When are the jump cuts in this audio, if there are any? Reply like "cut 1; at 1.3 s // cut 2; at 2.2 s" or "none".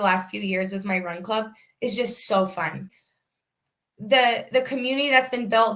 cut 1; at 2.8 s